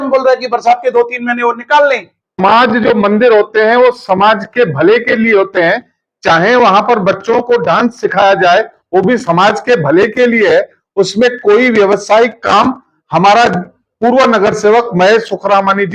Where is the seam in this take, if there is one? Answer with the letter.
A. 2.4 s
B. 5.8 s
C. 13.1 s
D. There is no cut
A